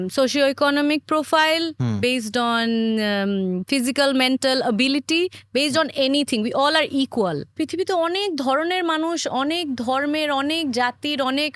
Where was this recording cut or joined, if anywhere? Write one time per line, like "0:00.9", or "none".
0:07.6